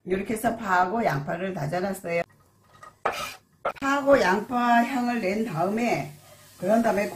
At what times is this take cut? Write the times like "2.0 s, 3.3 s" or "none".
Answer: 2.2 s